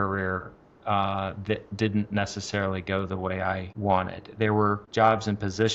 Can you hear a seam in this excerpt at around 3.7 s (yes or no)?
yes